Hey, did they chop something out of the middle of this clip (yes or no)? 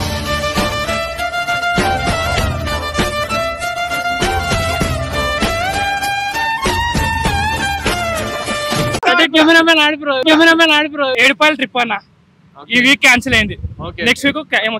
yes